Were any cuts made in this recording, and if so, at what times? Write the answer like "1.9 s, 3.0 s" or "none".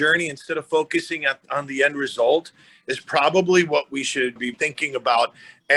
none

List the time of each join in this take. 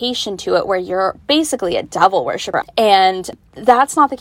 2.4 s, 3.3 s

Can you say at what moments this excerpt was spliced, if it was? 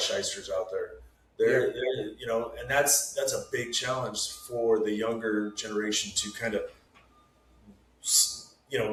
none

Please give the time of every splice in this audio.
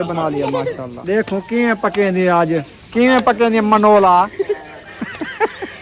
0.9 s, 2.8 s

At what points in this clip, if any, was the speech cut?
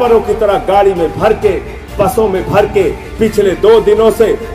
none

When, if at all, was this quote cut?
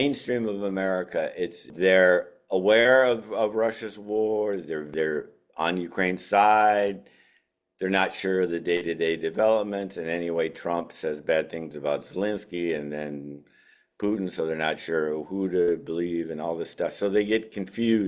1.7 s, 4.9 s

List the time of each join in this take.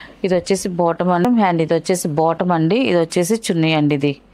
1.3 s

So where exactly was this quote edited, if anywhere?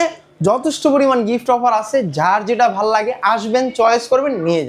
none

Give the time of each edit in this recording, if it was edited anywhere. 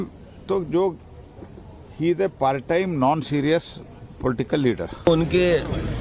none

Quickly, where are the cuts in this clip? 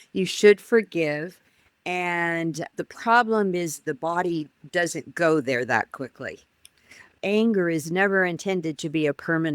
7.1 s

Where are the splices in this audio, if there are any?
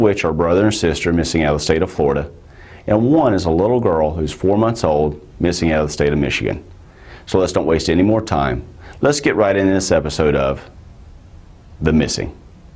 7.5 s

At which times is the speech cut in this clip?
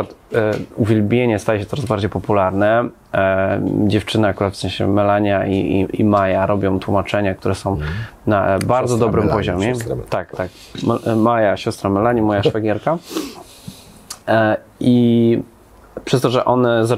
none

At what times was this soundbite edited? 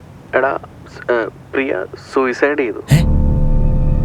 3.0 s

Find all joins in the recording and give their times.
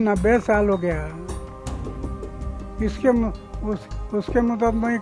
1.2 s, 2.8 s

